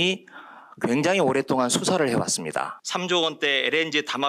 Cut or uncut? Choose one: cut